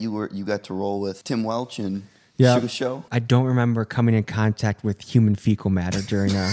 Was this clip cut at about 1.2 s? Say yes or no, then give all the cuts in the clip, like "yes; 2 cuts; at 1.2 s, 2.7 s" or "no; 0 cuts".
yes; 2 cuts; at 1.2 s, 3.1 s